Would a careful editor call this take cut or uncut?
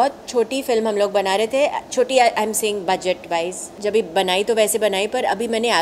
cut